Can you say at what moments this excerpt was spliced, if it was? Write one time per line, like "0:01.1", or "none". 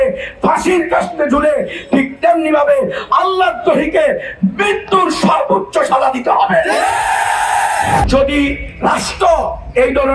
0:08.1